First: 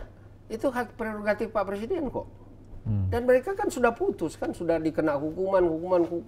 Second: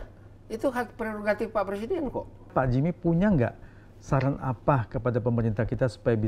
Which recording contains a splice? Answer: second; 1 cut; at 2.5 s

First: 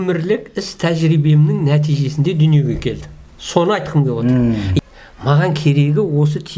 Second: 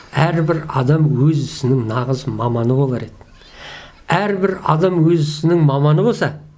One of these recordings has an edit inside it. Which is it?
first; 1 cut; at 4.8 s

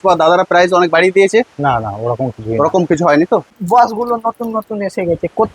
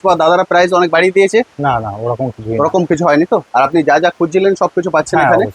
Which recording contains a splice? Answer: first; 1 cut; at 3.5 s

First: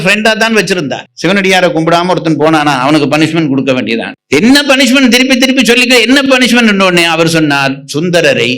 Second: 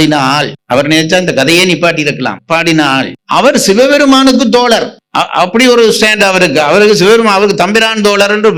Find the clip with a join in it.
first; 1 cut; at 1.1 s

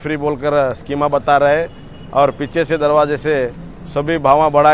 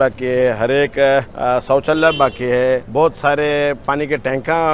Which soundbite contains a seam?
second; 2 cuts; at 1.3 s, 2.9 s

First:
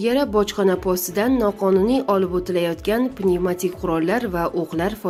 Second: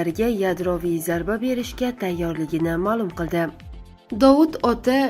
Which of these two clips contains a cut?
second; 1 cut; at 3.7 s

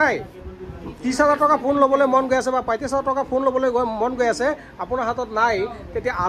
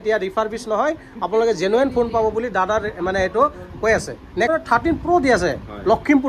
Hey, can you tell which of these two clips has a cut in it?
second; 1 cut; at 4.5 s

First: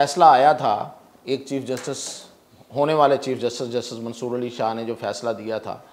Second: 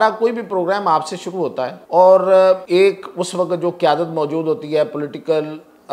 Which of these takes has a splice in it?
second; 2 cuts; at 1.8 s, 2.6 s

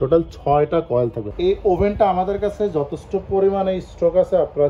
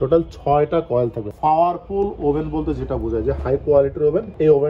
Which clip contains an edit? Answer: first; 1 cut; at 1.3 s

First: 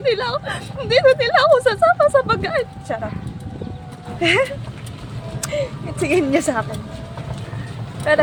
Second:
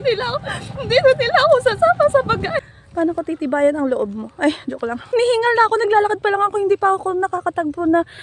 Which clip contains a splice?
second; 2 cuts; at 2.6 s, 5.1 s

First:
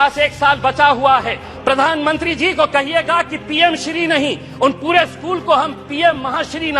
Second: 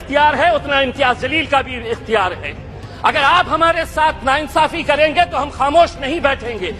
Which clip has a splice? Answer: first; 1 cut; at 1.5 s

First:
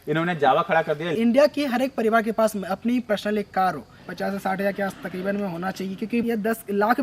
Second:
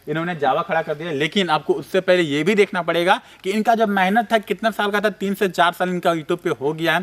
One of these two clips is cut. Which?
first; 3 cuts; at 1.1 s, 3.9 s, 6.2 s

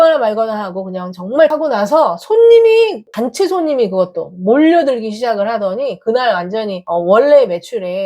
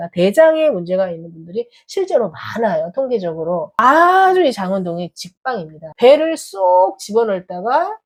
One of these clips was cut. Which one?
first; 3 cuts; at 1.5 s, 3.0 s, 6.8 s

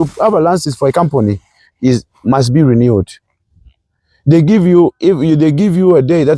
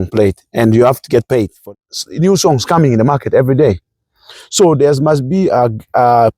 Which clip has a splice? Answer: second; 1 cut; at 1.6 s

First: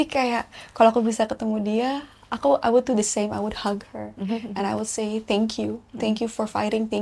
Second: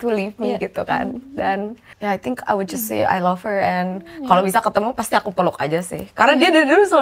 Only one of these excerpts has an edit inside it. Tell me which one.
second; 1 cut; at 1.9 s

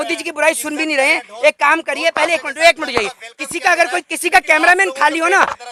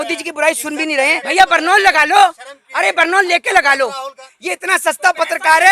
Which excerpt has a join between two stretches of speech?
second; 2 cuts; at 1.2 s, 4.3 s

